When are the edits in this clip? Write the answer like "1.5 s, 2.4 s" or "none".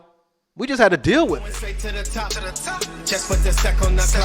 1.9 s